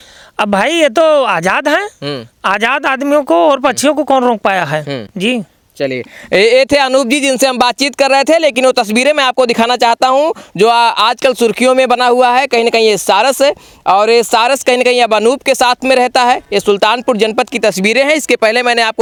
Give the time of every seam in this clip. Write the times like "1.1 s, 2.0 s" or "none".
none